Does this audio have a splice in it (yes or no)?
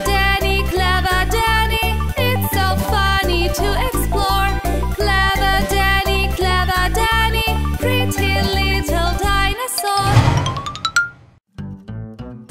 yes